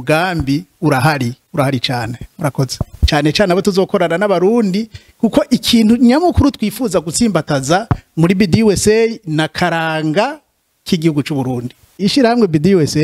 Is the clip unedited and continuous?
no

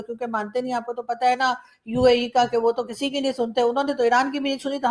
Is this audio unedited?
yes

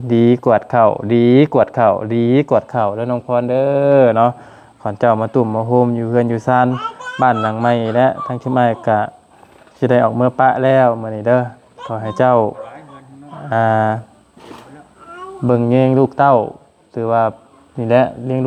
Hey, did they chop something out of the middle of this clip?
no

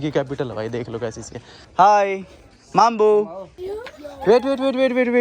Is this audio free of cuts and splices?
yes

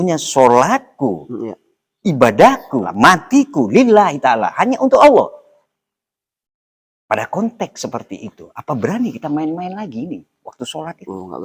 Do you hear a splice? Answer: yes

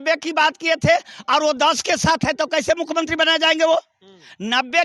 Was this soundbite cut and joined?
no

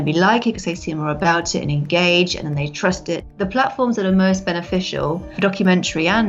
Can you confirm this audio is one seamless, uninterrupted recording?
no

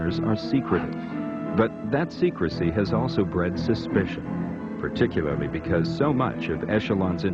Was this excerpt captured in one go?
no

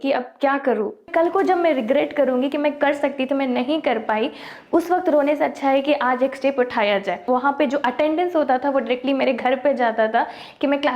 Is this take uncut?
no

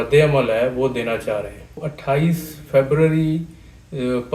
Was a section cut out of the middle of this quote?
yes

